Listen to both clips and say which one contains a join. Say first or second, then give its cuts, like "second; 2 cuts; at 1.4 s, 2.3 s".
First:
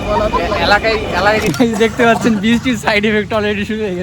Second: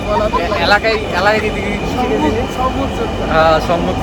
first; 1 cut; at 1.4 s